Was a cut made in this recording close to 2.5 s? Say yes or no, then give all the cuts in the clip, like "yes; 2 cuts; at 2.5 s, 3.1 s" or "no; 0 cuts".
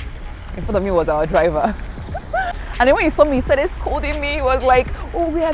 yes; 1 cut; at 2.5 s